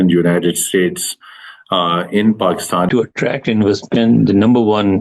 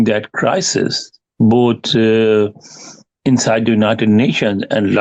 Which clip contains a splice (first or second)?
first